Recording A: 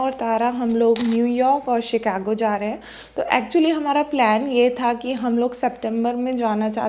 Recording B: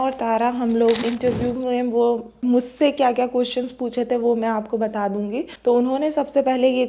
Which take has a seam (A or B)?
B